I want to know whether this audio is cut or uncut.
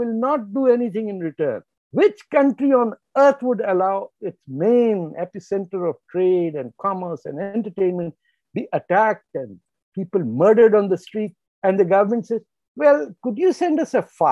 cut